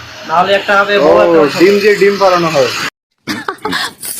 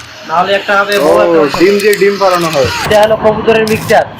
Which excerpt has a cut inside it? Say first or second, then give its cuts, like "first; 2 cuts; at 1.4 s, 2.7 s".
second; 1 cut; at 2.9 s